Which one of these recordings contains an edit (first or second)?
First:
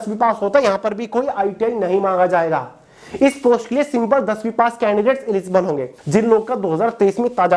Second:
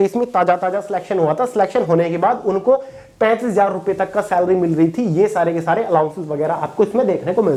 first